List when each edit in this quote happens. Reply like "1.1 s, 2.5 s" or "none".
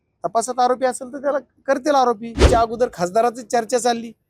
2.5 s